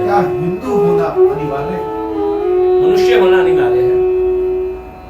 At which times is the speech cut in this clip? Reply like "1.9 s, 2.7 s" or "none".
2.4 s